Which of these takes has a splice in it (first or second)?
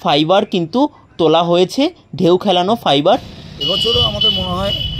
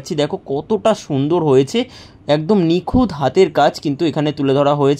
first